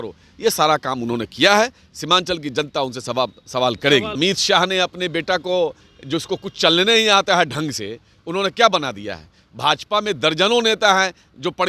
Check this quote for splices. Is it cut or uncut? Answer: cut